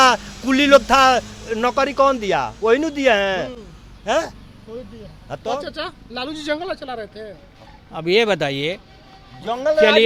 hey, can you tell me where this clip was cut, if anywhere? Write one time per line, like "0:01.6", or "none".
none